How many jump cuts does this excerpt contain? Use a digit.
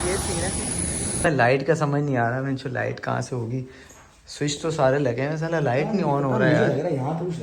1